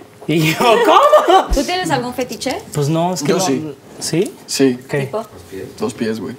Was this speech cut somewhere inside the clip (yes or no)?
yes